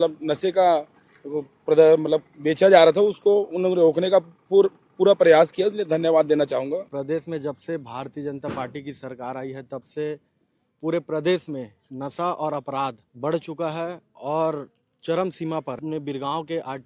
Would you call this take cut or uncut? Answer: cut